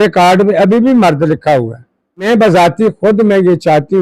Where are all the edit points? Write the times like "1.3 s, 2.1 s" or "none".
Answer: 2.3 s